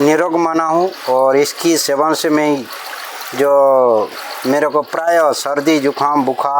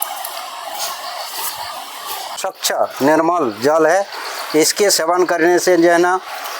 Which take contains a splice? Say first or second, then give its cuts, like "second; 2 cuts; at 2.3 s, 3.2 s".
second; 1 cut; at 2.4 s